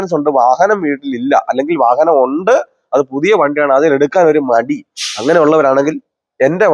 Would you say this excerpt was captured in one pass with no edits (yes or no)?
yes